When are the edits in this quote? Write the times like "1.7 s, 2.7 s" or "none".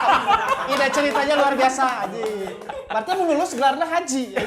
none